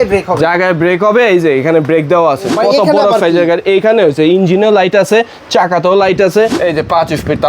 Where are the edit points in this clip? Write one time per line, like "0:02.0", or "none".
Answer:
0:02.5
0:06.6